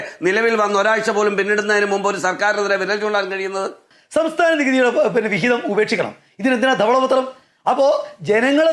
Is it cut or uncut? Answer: cut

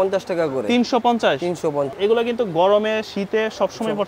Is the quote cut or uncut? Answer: cut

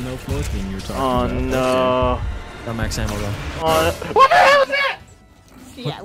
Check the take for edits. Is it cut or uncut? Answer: uncut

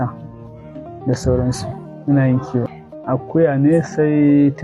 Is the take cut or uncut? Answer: cut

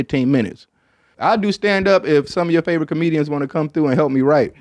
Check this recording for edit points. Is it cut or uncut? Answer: cut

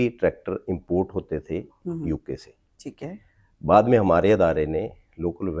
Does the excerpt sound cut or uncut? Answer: uncut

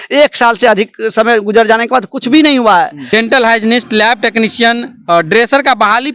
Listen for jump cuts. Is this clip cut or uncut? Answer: cut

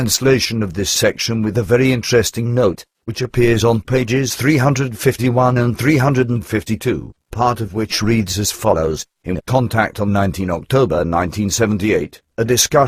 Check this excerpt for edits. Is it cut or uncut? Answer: uncut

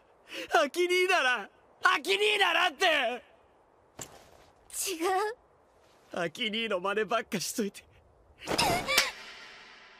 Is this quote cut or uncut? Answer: cut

